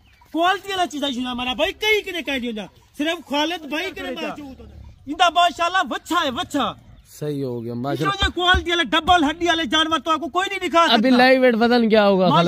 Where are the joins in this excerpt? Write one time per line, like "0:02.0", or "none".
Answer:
0:04.3